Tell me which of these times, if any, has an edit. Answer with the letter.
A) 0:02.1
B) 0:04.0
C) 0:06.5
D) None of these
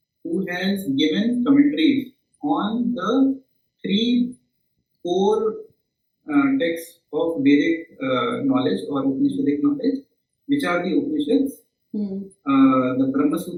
D